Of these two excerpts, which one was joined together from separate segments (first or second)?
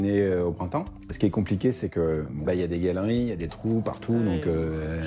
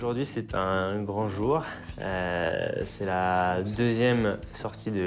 first